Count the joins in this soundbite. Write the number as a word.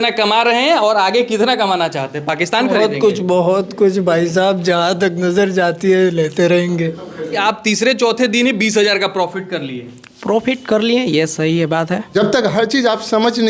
two